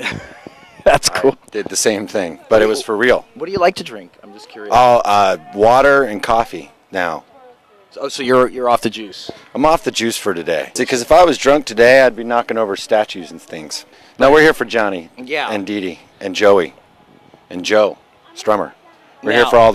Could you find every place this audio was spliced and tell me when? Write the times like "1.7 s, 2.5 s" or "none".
2.3 s